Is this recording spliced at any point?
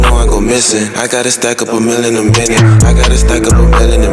no; 0 cuts

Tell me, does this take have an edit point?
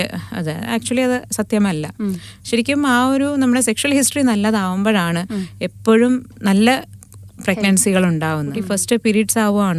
yes; 1 cut; at 8.6 s

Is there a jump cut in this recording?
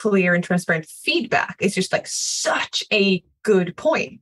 yes; 1 cut; at 3.3 s

